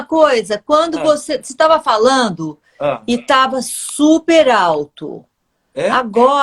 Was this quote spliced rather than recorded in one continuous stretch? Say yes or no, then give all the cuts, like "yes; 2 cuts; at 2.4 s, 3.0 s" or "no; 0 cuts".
yes; 1 cut; at 1.1 s